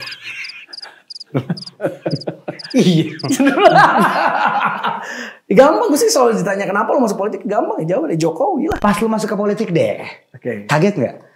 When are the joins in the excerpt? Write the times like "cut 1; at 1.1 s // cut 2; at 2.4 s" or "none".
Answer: cut 1; at 8.8 s

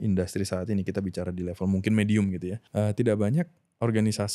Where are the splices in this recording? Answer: cut 1; at 2.6 s

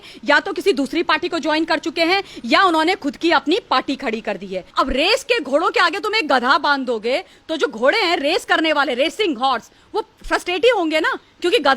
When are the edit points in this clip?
cut 1; at 4.6 s

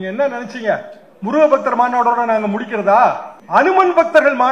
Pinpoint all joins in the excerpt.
cut 1; at 3.3 s

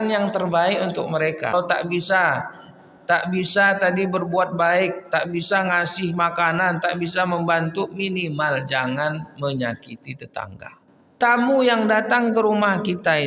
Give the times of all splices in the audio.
cut 1; at 1.5 s // cut 2; at 11.1 s

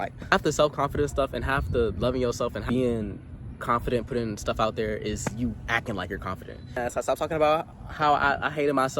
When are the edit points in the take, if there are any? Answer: cut 1; at 2.6 s // cut 2; at 6.8 s

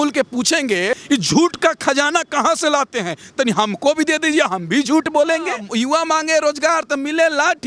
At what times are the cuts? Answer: cut 1; at 1.0 s // cut 2; at 5.6 s

